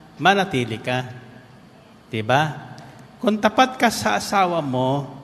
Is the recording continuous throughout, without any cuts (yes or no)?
yes